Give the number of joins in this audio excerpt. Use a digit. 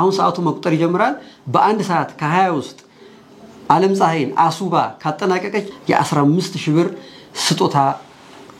1